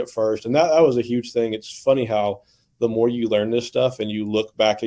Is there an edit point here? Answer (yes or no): no